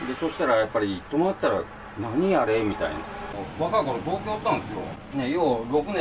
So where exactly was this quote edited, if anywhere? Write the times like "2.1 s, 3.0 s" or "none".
3.2 s, 4.9 s